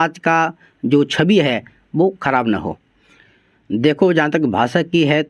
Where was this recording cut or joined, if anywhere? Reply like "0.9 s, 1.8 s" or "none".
3.1 s